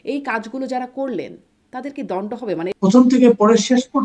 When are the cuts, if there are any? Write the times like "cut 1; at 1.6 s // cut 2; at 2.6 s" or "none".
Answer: cut 1; at 2.6 s